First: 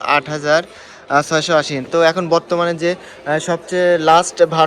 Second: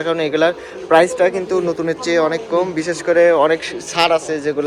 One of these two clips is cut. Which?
first; 1 cut; at 1.9 s

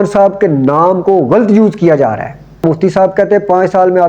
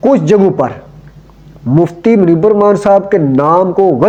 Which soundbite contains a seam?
first; 1 cut; at 2.6 s

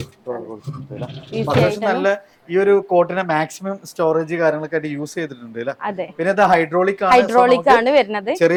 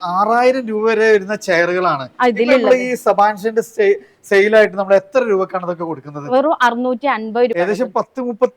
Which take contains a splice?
second; 1 cut; at 7.5 s

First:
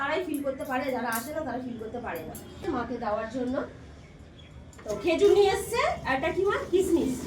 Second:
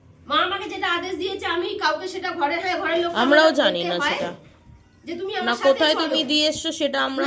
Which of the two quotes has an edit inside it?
first; 1 cut; at 2.6 s

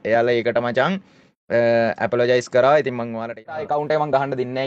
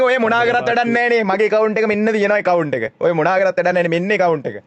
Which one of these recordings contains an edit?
first; 1 cut; at 3.6 s

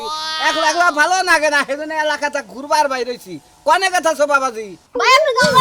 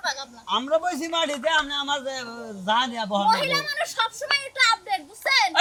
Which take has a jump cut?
first; 1 cut; at 4.7 s

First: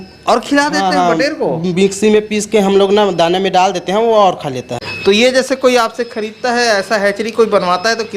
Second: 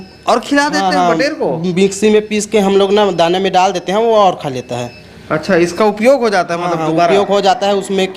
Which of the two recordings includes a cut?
first; 1 cut; at 4.8 s

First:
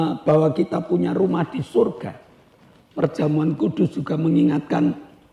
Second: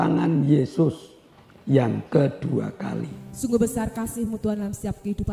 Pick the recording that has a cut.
second; 1 cut; at 3.2 s

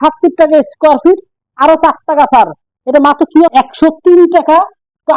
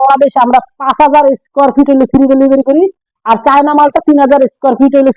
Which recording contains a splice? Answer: first; 1 cut; at 3.5 s

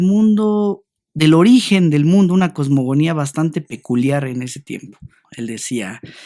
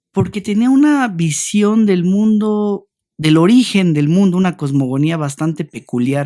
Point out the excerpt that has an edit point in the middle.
first; 1 cut; at 5.2 s

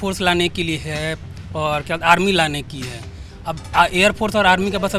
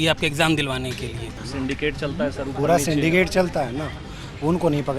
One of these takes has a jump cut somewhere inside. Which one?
second; 1 cut; at 1.4 s

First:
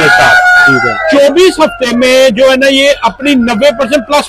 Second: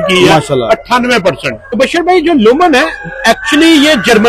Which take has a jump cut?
second; 1 cut; at 1.8 s

